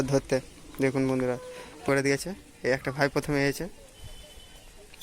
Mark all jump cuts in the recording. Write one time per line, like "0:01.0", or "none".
0:01.8